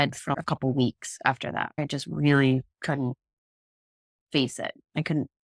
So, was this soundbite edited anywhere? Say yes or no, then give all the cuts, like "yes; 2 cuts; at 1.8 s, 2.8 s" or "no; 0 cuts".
yes; 1 cut; at 1.7 s